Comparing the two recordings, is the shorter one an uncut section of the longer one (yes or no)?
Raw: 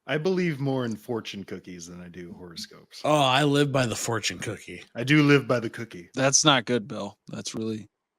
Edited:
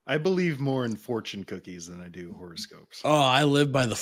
yes